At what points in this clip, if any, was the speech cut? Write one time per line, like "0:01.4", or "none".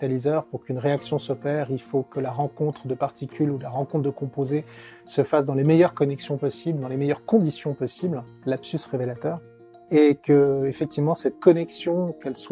0:08.3